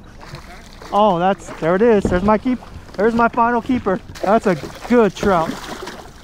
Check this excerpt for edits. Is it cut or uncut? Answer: cut